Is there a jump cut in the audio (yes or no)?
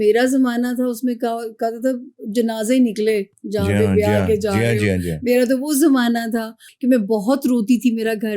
yes